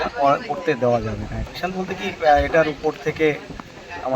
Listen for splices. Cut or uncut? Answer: cut